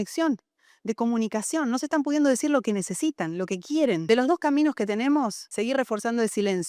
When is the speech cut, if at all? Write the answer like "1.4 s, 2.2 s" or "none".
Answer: 4.0 s, 5.4 s